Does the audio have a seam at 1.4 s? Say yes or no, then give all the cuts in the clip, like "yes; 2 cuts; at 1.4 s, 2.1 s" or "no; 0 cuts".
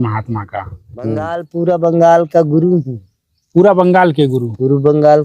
yes; 1 cut; at 1.4 s